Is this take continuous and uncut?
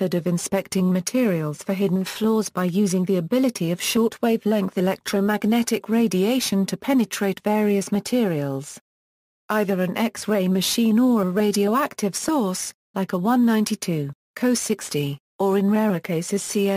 no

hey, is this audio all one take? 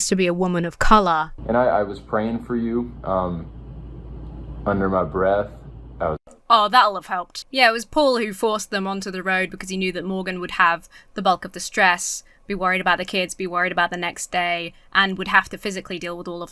no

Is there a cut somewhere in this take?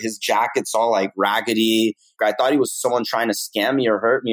yes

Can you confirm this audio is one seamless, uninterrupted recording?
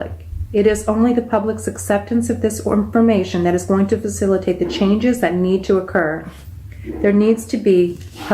no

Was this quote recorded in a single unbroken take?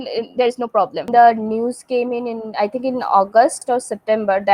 no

